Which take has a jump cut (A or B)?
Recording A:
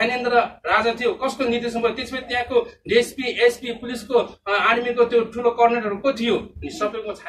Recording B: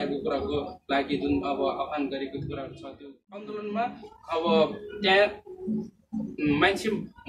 B